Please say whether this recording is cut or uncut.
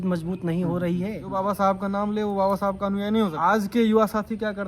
cut